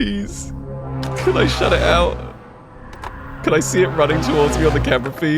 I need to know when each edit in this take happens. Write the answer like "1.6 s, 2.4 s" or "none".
3.2 s